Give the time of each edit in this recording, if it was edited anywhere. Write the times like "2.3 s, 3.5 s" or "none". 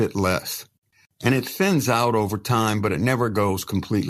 0.9 s